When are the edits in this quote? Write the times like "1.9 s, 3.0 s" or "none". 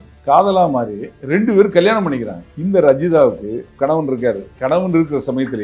2.4 s